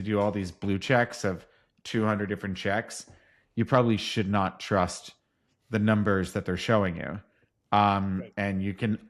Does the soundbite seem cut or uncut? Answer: uncut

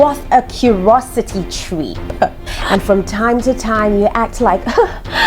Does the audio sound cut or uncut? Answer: cut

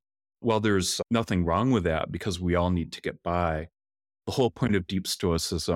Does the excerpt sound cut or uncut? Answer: uncut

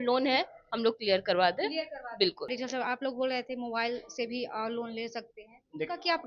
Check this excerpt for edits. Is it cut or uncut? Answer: cut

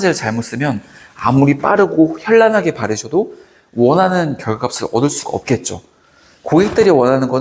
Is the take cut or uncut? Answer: uncut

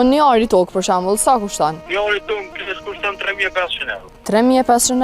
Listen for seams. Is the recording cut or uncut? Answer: cut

